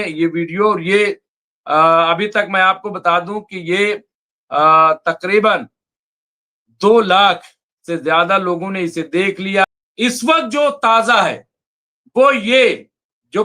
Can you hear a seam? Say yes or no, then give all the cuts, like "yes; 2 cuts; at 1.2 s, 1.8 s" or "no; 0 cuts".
yes; 1 cut; at 9.6 s